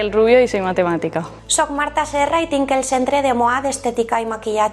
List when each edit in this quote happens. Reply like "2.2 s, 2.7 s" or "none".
1.2 s